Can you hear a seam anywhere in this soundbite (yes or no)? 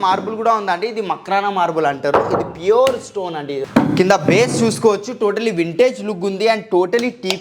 yes